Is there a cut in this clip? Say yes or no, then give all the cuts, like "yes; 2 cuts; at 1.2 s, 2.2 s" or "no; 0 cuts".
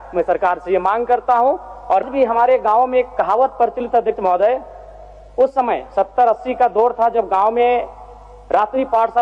yes; 1 cut; at 2.1 s